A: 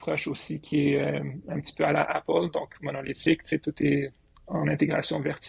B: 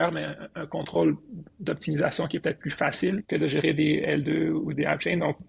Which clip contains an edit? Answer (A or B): B